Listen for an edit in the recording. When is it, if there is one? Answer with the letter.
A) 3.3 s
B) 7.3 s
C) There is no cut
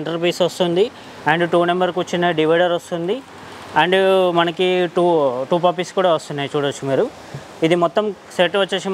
C